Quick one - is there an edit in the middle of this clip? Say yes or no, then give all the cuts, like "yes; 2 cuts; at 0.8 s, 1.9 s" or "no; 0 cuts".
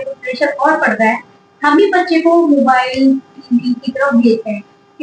no; 0 cuts